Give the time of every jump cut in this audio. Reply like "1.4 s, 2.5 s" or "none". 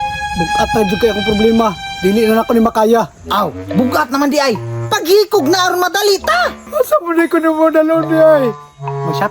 6.6 s